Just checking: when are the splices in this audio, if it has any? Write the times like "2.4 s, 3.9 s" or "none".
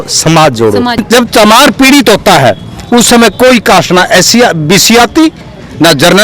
1.0 s